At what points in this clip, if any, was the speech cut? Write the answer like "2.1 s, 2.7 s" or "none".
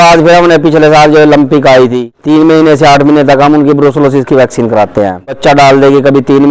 2.1 s, 5.4 s